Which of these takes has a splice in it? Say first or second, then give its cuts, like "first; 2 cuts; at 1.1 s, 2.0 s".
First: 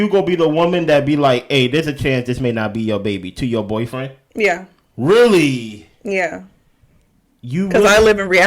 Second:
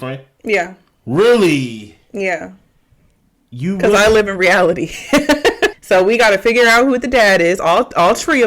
second; 1 cut; at 5.7 s